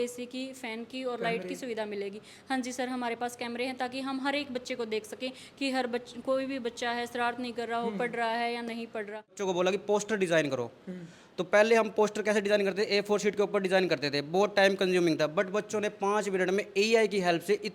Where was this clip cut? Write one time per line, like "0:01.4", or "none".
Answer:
0:09.4